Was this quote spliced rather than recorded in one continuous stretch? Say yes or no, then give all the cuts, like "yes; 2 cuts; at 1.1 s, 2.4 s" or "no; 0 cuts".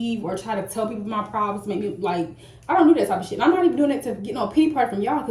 no; 0 cuts